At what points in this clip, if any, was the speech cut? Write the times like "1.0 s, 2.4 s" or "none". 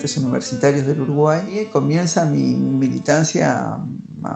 1.5 s

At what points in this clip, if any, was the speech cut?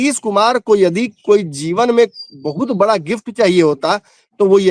none

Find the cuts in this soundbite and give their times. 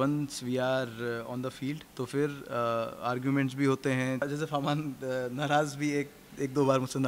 4.2 s

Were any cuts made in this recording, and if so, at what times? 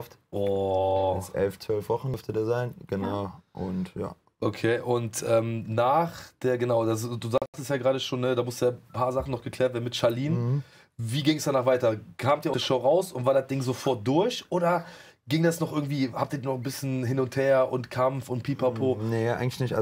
none

